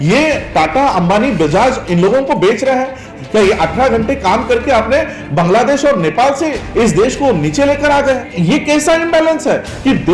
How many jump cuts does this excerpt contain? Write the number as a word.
two